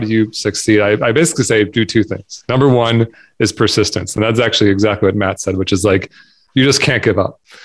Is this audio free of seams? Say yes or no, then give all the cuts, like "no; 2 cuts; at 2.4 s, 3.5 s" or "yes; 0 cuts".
yes; 0 cuts